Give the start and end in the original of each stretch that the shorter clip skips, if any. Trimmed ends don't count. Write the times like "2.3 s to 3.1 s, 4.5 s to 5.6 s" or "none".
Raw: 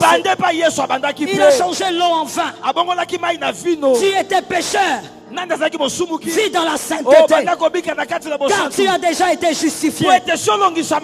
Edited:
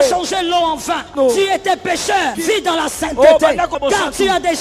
2.6 s to 3.8 s, 5.0 s to 6.3 s, 7.6 s to 8.3 s